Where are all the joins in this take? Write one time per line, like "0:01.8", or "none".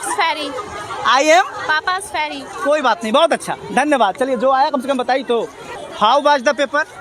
0:05.6